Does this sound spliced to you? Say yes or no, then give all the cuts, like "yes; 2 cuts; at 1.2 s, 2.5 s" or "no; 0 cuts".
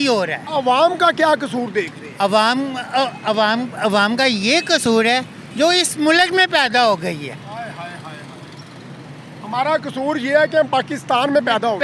no; 0 cuts